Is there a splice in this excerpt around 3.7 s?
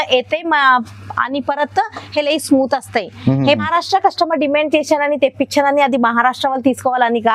yes; 1 cut; at 3.7 s

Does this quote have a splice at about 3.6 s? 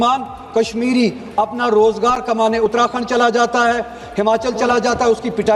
no; 0 cuts

